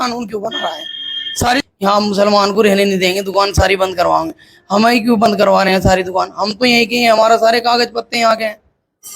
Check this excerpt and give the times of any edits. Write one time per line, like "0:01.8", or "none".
0:01.6